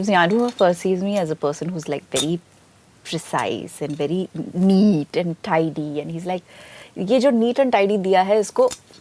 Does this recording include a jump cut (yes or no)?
no